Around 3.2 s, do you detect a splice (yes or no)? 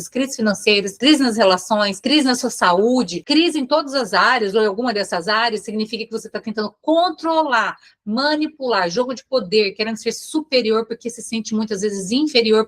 yes